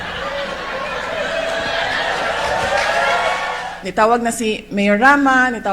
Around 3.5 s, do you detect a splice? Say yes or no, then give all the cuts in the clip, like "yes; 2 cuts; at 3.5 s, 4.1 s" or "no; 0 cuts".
yes; 1 cut; at 3.5 s